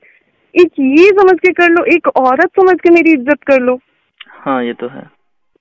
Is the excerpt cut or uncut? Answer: uncut